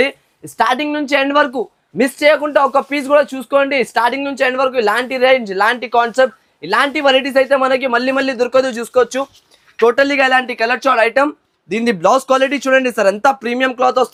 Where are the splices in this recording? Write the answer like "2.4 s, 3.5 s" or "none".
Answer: none